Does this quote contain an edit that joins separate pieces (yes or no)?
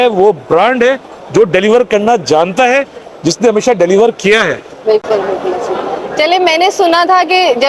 no